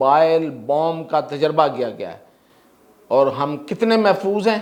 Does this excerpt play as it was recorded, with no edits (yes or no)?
yes